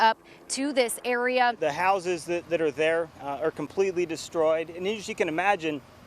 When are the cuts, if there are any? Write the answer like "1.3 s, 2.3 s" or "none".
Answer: 1.6 s